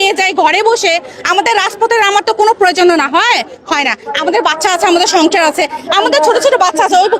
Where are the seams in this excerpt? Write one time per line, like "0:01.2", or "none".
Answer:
none